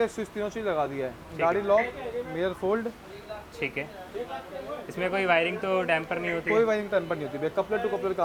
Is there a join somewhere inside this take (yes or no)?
no